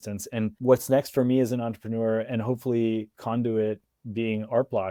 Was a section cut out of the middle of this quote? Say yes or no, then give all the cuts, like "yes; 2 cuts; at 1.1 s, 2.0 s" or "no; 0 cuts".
no; 0 cuts